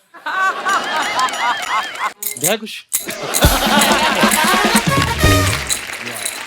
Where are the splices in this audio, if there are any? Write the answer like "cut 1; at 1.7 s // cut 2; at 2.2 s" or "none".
cut 1; at 2.2 s